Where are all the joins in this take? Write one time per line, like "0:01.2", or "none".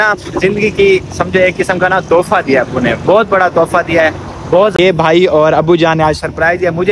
0:04.8

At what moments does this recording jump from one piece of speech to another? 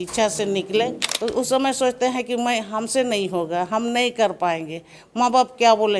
0:01.1

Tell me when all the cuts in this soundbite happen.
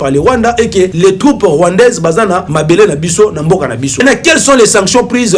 0:00.9
0:02.5
0:04.0

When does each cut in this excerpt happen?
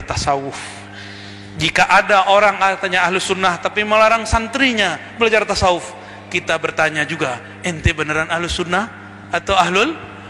none

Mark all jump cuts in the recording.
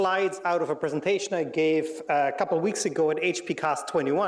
0:02.9

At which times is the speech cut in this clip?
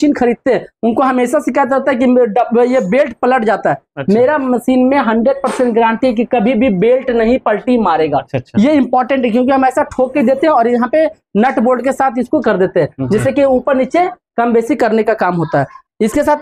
none

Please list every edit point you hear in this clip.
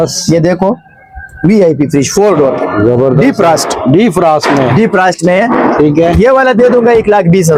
none

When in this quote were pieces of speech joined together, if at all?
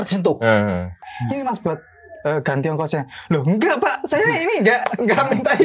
0:01.1

